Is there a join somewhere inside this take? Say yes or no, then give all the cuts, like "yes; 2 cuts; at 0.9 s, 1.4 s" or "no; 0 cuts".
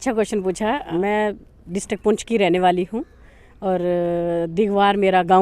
yes; 1 cut; at 0.9 s